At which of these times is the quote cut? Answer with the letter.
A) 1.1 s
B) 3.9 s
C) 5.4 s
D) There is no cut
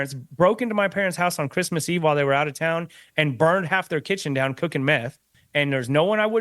C